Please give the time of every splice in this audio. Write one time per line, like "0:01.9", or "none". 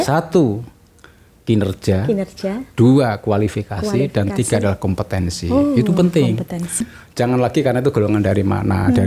0:06.8